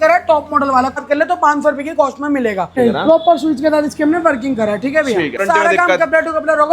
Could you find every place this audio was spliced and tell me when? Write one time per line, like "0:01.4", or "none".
0:01.0
0:02.8
0:05.4